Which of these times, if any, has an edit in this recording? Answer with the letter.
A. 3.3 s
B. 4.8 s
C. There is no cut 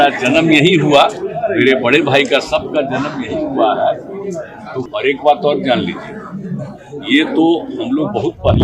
B